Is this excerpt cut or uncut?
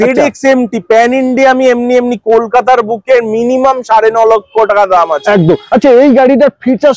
uncut